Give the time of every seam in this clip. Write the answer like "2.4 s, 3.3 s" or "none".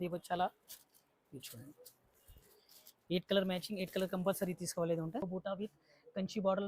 5.2 s